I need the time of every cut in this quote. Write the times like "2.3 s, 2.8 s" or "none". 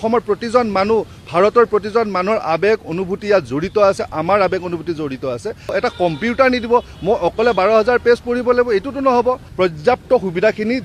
5.7 s, 9.5 s